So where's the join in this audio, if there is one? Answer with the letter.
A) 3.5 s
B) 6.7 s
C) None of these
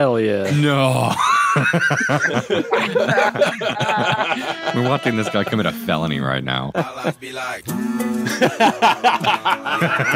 B